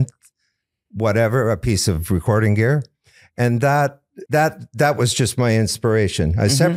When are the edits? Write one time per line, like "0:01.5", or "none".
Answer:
0:04.1